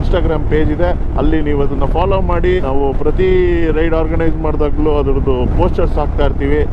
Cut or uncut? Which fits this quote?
uncut